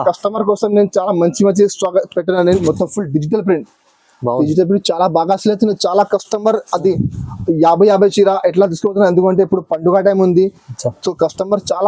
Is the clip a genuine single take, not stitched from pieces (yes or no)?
no